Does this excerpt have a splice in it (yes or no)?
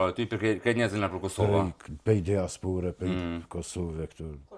no